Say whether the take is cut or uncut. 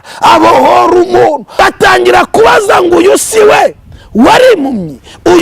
cut